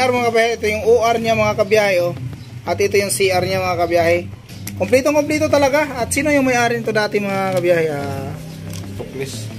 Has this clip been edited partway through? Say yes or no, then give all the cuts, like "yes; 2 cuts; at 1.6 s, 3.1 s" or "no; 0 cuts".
no; 0 cuts